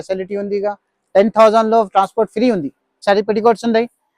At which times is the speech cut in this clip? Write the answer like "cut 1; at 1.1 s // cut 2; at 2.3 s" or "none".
cut 1; at 3.0 s